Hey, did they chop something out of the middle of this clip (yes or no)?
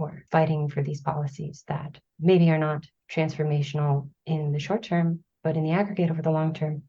yes